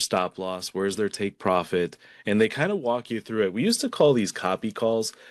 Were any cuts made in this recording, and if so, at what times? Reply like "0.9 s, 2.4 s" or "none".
none